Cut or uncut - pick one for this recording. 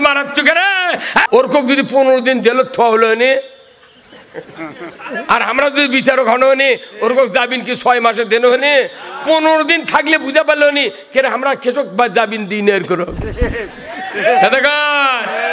cut